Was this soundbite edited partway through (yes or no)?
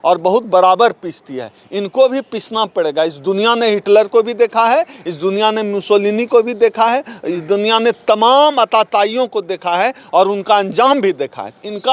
no